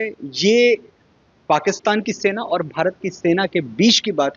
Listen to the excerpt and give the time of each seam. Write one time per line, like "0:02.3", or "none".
none